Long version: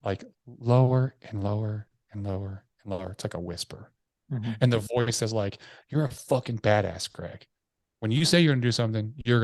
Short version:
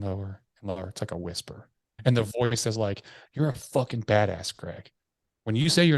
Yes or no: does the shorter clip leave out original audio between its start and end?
yes